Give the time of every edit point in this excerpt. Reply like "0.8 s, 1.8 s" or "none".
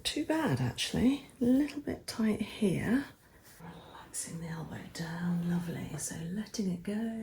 3.6 s